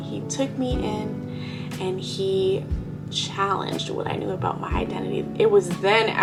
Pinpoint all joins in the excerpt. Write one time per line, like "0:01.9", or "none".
none